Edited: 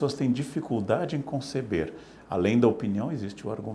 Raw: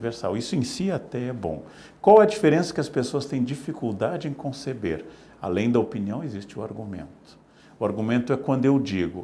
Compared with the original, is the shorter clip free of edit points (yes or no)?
yes